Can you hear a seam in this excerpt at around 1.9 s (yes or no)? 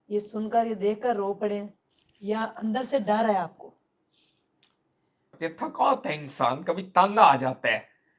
no